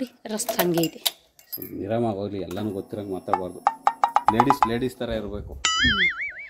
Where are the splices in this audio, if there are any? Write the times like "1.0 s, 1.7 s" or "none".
none